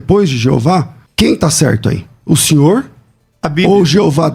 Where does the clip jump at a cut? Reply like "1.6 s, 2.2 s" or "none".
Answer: 1.0 s